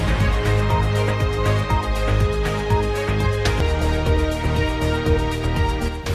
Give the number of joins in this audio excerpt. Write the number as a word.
zero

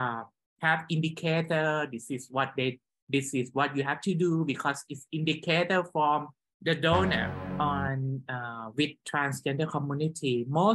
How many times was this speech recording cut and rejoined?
one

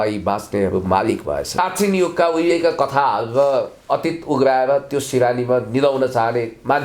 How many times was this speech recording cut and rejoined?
one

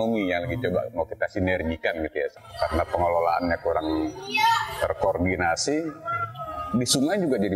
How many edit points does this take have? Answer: one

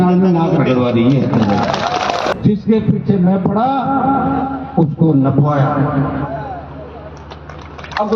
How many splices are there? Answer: one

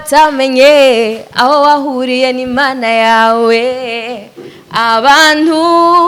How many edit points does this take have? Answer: zero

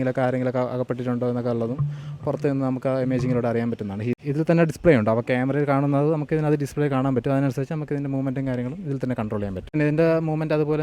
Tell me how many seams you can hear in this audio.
two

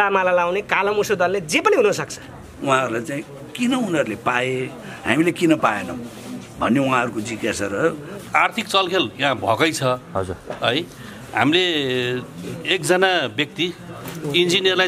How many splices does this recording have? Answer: two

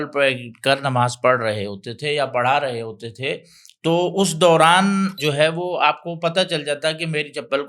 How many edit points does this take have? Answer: one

